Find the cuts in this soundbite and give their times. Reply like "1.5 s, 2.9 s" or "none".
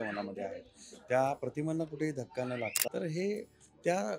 2.9 s